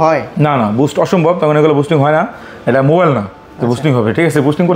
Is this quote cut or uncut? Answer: uncut